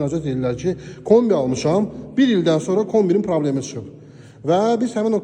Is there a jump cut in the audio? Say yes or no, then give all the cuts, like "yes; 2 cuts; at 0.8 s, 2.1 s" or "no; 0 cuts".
no; 0 cuts